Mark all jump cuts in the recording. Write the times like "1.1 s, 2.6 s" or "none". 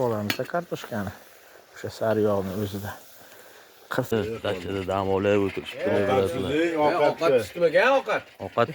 4.1 s

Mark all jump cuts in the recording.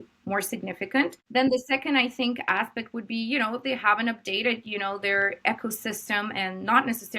1.2 s

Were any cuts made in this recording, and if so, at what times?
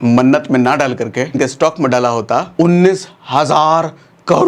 1.4 s, 2.5 s

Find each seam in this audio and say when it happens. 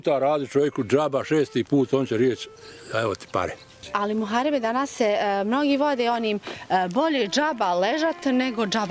3.9 s

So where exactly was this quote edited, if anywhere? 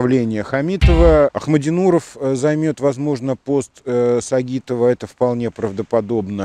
1.4 s

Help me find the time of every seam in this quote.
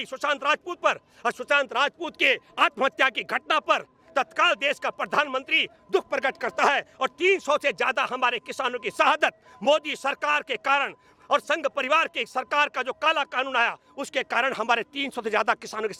none

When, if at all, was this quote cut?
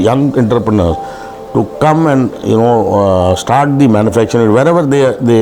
none

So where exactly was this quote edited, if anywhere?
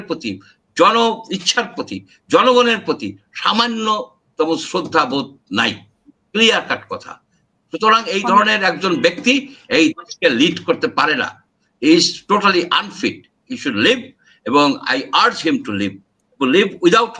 none

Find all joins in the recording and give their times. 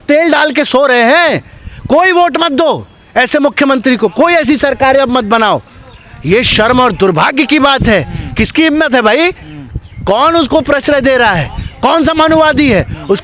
none

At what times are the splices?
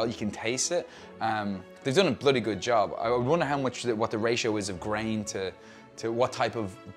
none

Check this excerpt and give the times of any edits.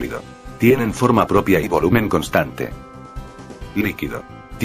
1.4 s

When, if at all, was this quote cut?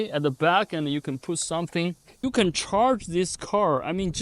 2.2 s

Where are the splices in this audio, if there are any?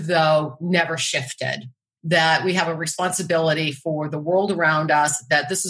1.9 s

